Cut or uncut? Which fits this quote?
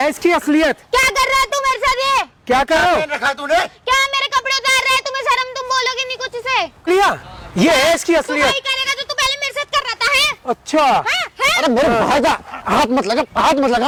uncut